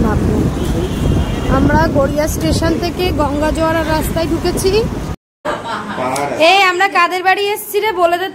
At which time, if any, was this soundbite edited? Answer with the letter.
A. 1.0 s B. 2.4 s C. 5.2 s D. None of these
C